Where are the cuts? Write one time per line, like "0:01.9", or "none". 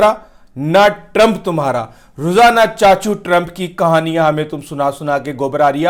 none